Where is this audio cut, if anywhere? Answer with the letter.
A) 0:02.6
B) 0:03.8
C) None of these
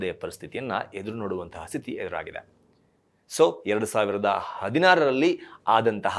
C